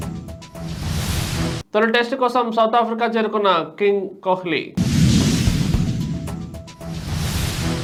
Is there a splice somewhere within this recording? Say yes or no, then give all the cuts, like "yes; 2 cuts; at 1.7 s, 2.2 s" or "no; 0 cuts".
no; 0 cuts